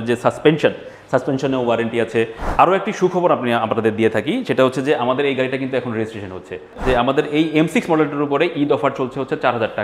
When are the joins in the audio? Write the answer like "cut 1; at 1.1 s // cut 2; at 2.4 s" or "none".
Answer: cut 1; at 2.4 s // cut 2; at 6.8 s

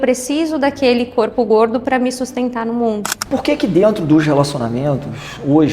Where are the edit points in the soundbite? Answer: cut 1; at 3.2 s

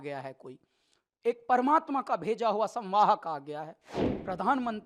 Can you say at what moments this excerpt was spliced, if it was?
cut 1; at 3.9 s

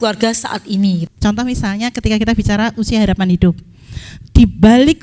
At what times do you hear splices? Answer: cut 1; at 1.1 s

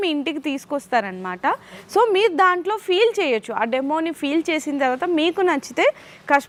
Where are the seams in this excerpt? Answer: none

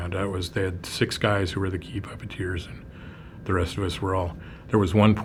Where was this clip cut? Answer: none

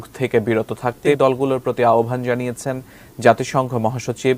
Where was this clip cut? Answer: cut 1; at 1.0 s

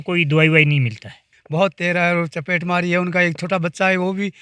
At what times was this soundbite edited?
cut 1; at 1.3 s

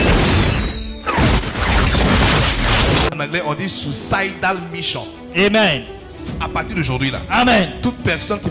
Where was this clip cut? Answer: cut 1; at 3.2 s

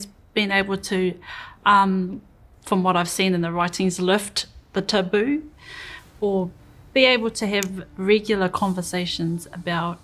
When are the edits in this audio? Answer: cut 1; at 6.6 s

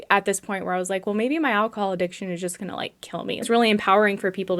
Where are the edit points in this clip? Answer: cut 1; at 3.5 s

